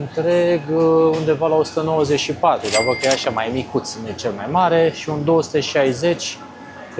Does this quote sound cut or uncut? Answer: uncut